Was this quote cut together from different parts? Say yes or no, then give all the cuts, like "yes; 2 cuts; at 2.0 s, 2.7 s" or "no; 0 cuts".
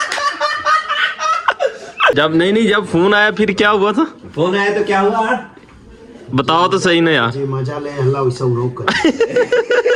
yes; 1 cut; at 2.1 s